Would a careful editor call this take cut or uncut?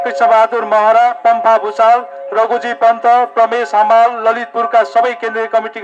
uncut